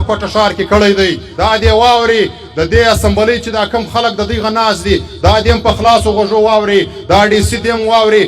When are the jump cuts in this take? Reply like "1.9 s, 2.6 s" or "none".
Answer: 1.2 s